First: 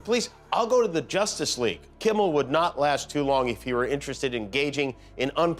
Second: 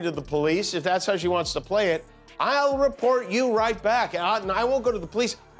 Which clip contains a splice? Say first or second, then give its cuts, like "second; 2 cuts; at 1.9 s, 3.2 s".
first; 1 cut; at 1.9 s